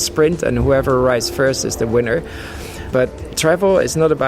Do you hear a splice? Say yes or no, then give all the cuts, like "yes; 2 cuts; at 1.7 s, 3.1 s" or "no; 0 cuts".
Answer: yes; 1 cut; at 2.8 s